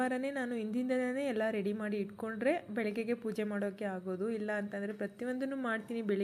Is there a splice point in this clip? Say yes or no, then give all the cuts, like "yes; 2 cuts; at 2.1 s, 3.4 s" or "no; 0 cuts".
no; 0 cuts